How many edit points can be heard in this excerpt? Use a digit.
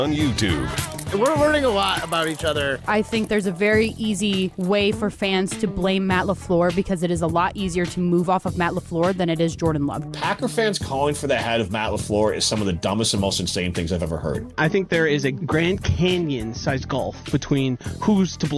1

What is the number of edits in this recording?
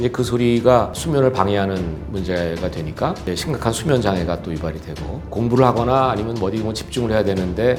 0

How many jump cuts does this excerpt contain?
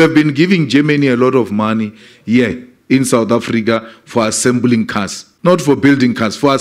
1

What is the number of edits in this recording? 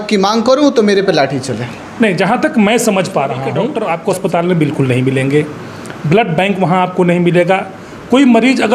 1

